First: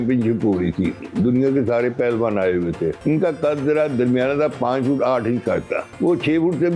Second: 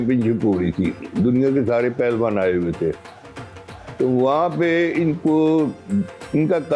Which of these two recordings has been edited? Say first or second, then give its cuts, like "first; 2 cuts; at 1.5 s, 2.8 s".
first; 2 cuts; at 3.0 s, 5.8 s